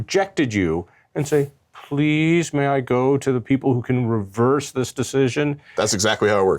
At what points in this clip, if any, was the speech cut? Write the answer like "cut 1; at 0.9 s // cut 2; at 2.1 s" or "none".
cut 1; at 5.7 s